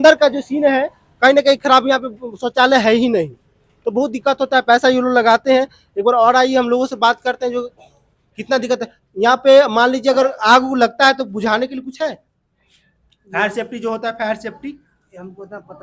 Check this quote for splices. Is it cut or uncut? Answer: uncut